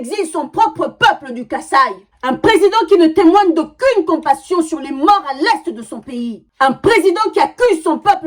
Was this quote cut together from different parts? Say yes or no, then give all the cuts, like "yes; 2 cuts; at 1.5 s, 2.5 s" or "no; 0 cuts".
no; 0 cuts